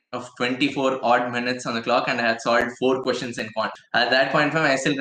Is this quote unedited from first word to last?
no; 1 cut; at 3.7 s

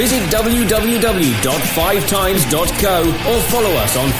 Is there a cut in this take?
no; 0 cuts

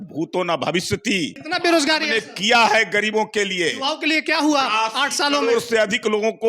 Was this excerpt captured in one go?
no; 1 cut; at 1.4 s

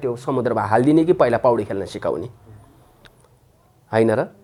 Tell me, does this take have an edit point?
no; 0 cuts

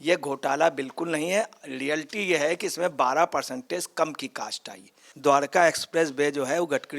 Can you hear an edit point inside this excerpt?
yes; 1 cut; at 5.1 s

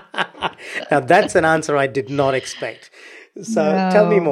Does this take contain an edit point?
no; 0 cuts

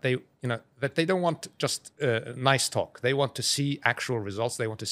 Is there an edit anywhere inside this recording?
no; 0 cuts

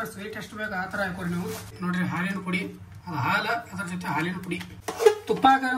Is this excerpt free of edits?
no; 2 cuts; at 1.7 s, 4.7 s

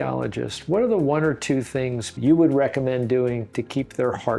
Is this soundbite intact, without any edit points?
no; 1 cut; at 2.1 s

